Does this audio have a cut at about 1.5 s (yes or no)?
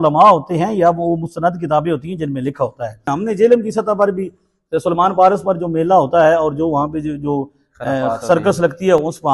no